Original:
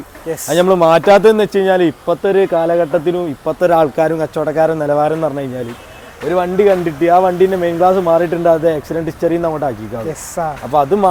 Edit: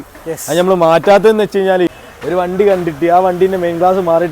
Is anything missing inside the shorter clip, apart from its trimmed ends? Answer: yes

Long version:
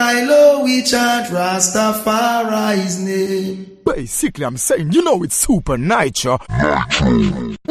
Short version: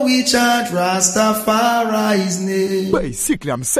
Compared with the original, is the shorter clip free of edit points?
no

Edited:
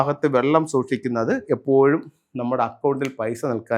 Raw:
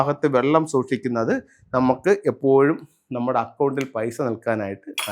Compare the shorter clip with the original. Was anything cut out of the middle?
yes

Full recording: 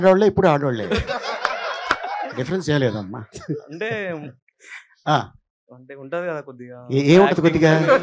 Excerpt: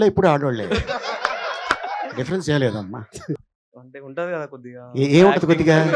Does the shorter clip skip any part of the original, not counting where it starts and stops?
yes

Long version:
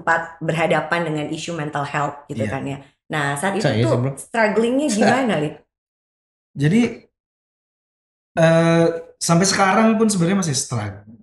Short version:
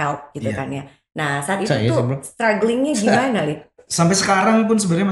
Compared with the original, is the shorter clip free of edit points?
no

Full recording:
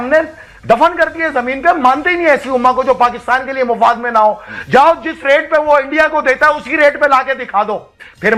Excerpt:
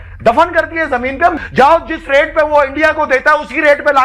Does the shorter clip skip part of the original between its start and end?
yes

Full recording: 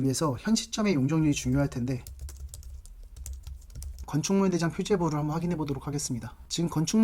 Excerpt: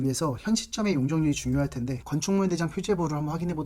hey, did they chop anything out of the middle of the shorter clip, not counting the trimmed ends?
yes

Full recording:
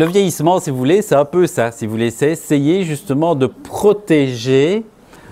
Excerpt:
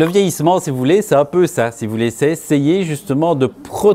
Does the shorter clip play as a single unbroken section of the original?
yes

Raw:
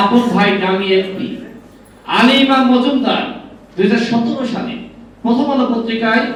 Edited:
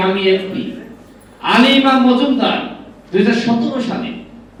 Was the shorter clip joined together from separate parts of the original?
no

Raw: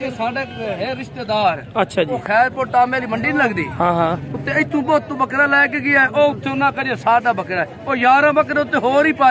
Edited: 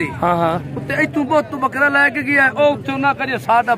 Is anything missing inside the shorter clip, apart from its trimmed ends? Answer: no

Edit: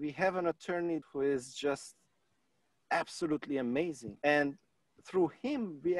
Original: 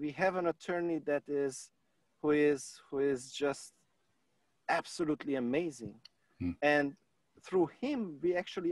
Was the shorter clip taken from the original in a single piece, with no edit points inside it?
no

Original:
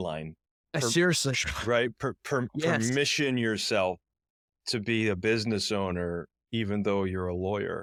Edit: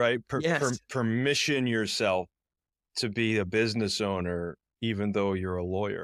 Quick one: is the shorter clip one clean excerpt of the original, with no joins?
yes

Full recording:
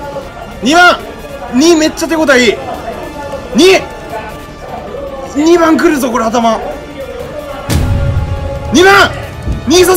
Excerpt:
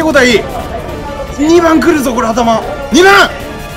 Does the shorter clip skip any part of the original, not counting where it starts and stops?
yes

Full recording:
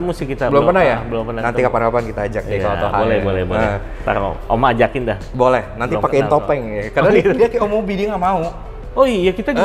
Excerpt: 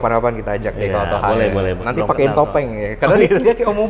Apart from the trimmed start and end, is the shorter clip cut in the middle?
yes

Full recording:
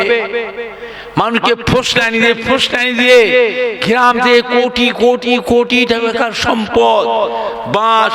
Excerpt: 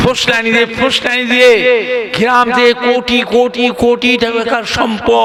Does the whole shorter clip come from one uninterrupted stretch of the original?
yes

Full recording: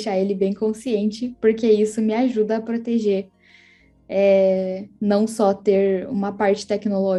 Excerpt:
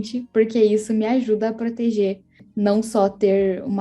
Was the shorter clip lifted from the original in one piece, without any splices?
no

